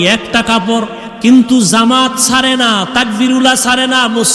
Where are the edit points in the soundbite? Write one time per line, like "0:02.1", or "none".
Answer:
0:01.0